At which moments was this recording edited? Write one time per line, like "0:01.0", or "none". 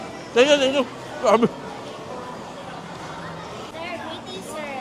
0:03.7